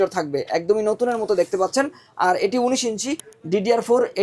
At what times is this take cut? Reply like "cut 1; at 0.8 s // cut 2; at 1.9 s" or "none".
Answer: cut 1; at 3.3 s